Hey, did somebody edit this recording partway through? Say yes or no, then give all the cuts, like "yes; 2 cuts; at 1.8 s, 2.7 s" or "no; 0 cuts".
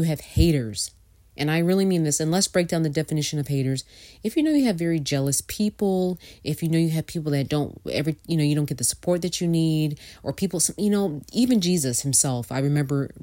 no; 0 cuts